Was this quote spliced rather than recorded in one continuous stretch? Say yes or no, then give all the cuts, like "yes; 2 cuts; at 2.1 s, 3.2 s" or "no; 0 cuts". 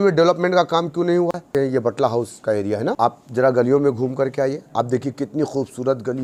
yes; 3 cuts; at 1.5 s, 3.0 s, 4.6 s